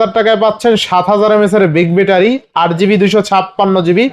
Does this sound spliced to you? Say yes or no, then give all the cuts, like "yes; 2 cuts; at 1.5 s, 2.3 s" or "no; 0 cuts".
no; 0 cuts